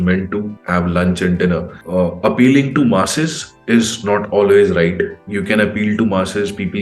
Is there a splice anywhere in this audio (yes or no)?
yes